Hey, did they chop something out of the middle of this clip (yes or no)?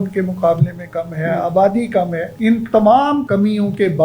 yes